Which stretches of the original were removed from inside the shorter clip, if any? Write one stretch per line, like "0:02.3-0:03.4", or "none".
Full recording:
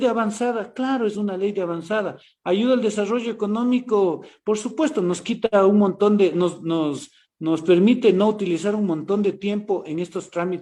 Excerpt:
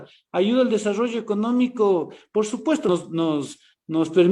0:05.0-0:06.4